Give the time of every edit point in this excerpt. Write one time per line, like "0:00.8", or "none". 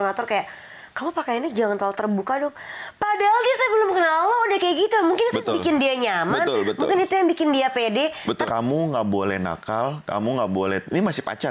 0:08.5